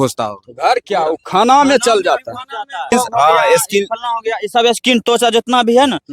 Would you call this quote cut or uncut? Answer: cut